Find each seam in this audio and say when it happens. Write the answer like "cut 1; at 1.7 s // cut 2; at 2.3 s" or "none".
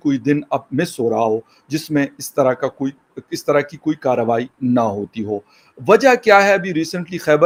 none